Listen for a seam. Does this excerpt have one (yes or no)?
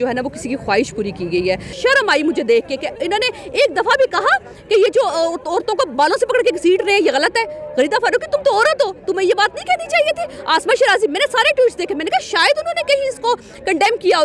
yes